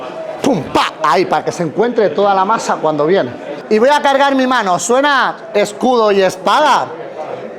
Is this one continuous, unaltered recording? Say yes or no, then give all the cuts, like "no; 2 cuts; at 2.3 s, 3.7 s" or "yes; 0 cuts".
no; 1 cut; at 3.5 s